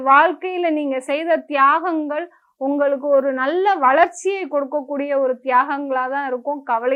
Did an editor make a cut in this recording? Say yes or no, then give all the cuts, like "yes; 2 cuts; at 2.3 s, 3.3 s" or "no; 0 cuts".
no; 0 cuts